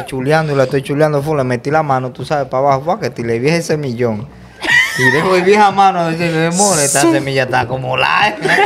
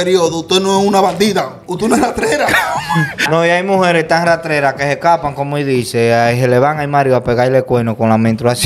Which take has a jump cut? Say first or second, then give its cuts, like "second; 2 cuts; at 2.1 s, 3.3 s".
second; 1 cut; at 3.3 s